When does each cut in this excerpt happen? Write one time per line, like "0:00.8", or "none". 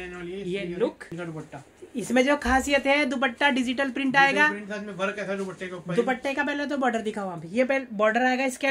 0:01.1